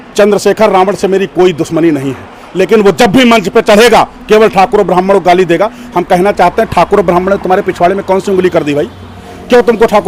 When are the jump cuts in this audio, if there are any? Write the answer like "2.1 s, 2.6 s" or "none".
none